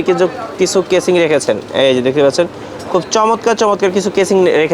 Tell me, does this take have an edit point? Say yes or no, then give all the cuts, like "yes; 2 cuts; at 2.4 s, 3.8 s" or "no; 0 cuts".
no; 0 cuts